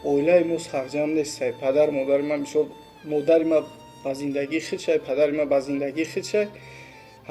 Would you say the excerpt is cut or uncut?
uncut